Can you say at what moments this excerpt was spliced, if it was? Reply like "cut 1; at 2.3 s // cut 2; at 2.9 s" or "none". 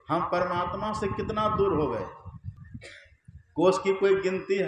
cut 1; at 2.6 s